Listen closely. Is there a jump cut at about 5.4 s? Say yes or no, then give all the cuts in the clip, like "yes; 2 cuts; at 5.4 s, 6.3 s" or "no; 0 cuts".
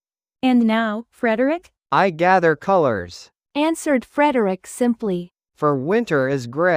yes; 2 cuts; at 1.8 s, 5.4 s